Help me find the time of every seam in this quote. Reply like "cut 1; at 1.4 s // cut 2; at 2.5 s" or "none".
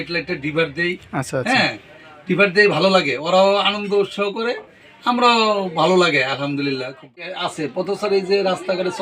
cut 1; at 7.3 s